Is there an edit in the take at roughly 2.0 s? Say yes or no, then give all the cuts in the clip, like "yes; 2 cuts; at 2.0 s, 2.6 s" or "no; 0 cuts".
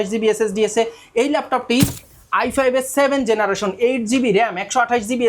yes; 1 cut; at 2.0 s